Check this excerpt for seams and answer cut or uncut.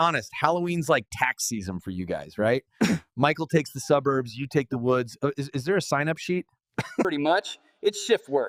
uncut